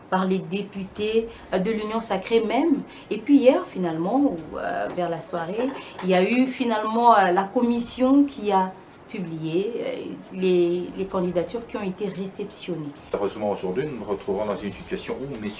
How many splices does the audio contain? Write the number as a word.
one